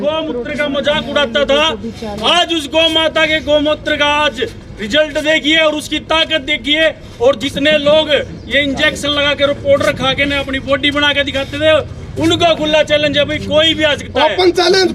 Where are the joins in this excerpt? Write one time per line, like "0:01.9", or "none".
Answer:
none